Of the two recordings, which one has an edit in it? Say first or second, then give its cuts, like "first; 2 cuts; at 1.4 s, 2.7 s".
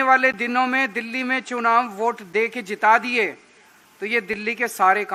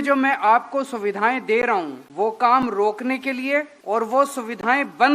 second; 2 cuts; at 2.0 s, 3.8 s